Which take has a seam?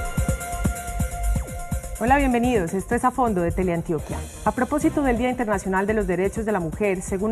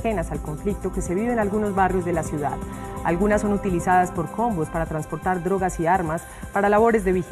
second; 1 cut; at 3.3 s

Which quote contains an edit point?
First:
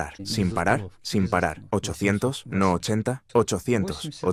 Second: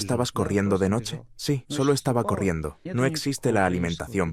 second; 1 cut; at 2.7 s

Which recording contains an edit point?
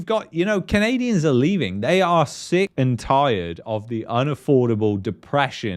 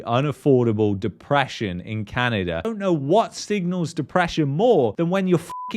second; 1 cut; at 2.6 s

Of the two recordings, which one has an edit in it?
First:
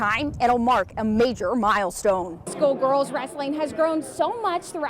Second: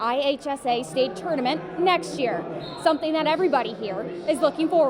first; 1 cut; at 2.5 s

